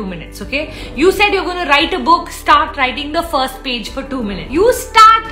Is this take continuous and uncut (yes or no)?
no